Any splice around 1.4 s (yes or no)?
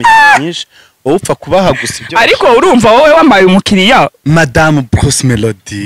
no